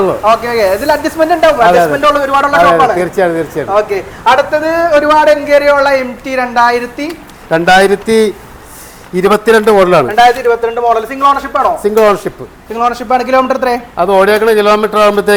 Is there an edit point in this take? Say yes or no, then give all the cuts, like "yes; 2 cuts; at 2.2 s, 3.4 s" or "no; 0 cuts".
no; 0 cuts